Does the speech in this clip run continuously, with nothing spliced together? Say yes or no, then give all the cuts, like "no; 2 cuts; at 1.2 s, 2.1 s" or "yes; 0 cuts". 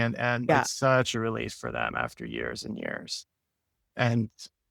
yes; 0 cuts